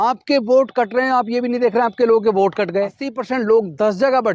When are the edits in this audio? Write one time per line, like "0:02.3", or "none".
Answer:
0:03.1

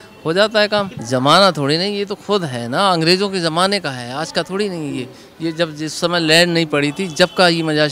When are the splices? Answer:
0:01.0

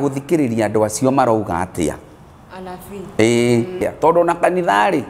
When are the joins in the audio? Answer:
0:03.8

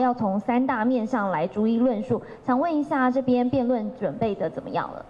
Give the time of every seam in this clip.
none

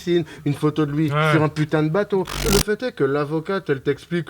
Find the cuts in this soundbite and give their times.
0:02.4

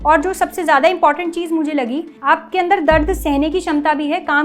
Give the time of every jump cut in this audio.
0:02.1

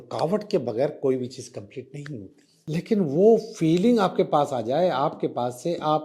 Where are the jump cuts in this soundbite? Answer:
0:02.4

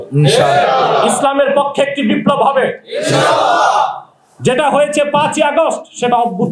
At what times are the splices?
none

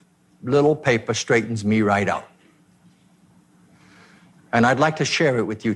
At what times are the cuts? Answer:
none

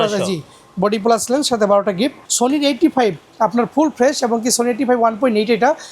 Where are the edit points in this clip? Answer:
0:02.2

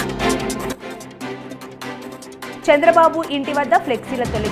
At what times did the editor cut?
0:02.5

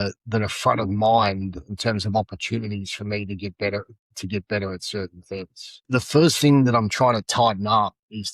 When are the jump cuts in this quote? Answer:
0:05.8

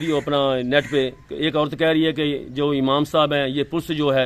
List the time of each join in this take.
none

